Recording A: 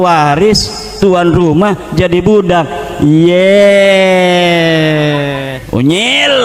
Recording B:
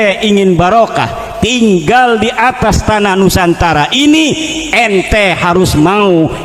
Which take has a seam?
A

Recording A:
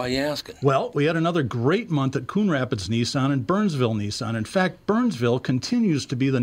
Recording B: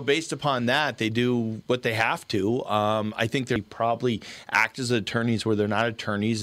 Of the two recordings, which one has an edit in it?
B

